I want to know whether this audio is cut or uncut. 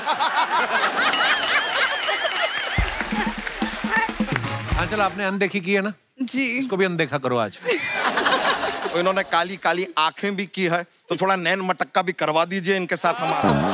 cut